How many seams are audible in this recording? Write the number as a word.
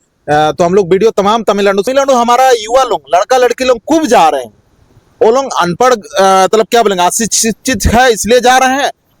one